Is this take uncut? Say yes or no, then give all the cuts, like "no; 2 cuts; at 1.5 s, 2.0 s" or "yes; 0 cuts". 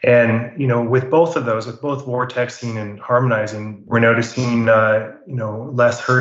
yes; 0 cuts